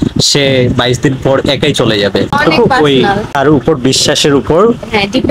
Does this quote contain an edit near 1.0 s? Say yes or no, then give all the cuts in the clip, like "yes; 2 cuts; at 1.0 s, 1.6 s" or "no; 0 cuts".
no; 2 cuts; at 2.4 s, 3.4 s